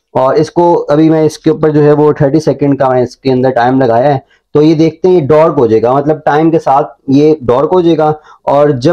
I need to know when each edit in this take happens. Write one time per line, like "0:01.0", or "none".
none